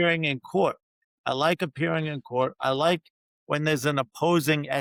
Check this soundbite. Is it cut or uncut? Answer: uncut